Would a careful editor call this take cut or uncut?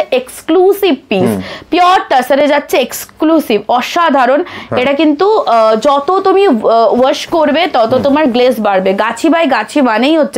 uncut